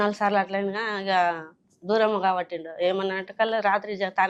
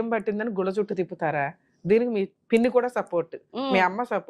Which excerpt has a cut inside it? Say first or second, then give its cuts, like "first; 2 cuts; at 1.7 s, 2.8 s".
second; 1 cut; at 2.4 s